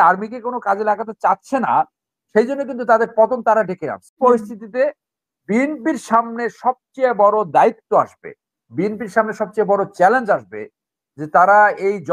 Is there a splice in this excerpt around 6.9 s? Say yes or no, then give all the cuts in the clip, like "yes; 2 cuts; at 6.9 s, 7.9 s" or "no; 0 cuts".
no; 1 cut; at 4.1 s